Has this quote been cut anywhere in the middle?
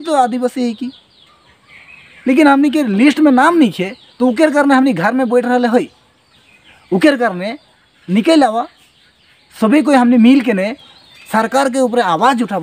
no; 0 cuts

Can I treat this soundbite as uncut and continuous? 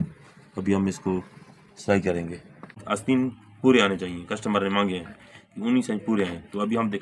no; 1 cut; at 2.8 s

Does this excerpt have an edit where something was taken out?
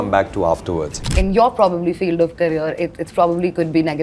yes; 1 cut; at 1.0 s

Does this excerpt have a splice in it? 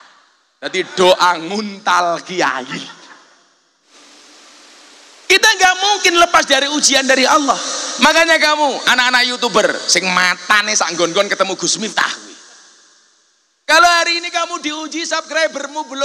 yes; 1 cut; at 3.9 s

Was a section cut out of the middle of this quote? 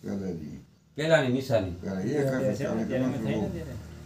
no; 0 cuts

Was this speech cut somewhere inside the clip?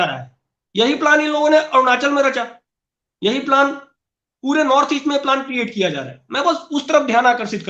no; 0 cuts

